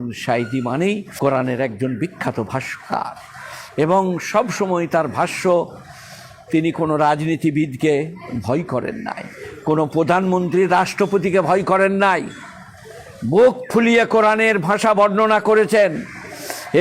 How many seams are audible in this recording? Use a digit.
1